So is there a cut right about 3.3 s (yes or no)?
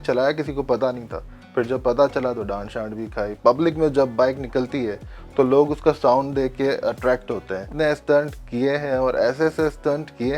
yes